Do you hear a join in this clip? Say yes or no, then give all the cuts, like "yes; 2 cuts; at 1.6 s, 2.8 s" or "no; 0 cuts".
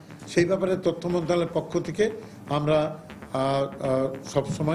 no; 0 cuts